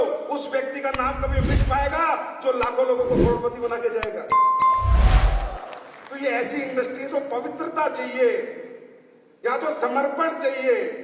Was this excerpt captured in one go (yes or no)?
yes